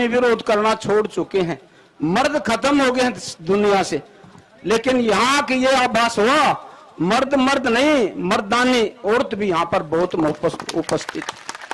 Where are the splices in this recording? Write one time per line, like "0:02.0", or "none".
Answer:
none